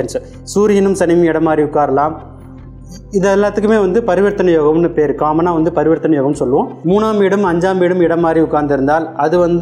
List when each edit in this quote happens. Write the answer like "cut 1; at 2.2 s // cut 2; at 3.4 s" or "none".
cut 1; at 6.8 s

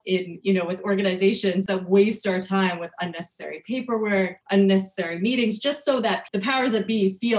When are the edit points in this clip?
cut 1; at 1.7 s // cut 2; at 4.4 s // cut 3; at 6.2 s

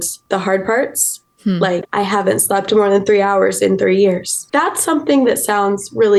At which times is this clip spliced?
none

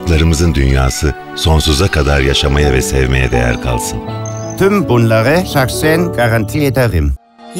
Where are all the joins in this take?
none

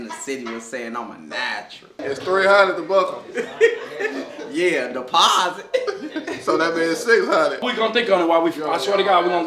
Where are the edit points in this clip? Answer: cut 1; at 2.0 s // cut 2; at 7.7 s

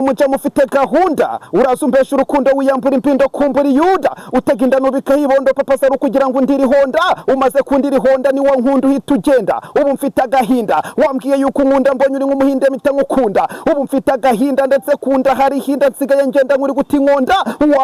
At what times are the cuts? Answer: none

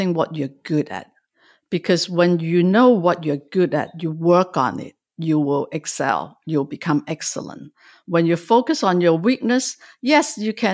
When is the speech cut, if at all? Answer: none

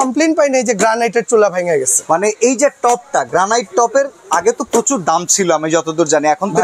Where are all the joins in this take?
none

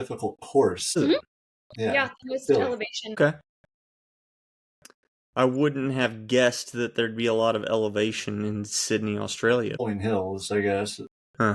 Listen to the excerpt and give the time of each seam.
cut 1; at 1.0 s // cut 2; at 3.2 s // cut 3; at 9.8 s

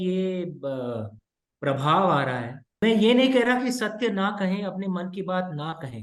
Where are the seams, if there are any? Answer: cut 1; at 2.8 s

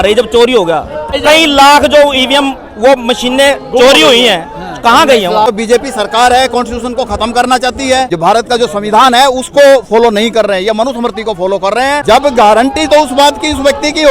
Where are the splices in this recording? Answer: cut 1; at 1.1 s // cut 2; at 5.5 s // cut 3; at 8.1 s // cut 4; at 12.0 s

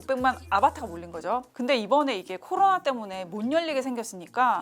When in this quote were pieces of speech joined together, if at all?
cut 1; at 1.5 s

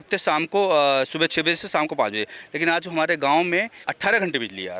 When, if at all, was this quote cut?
cut 1; at 3.8 s

